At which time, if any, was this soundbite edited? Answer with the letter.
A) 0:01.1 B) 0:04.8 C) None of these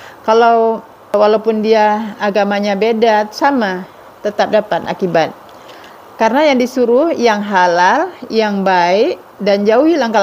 A